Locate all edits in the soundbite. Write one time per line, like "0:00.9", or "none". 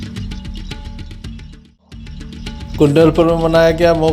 0:02.4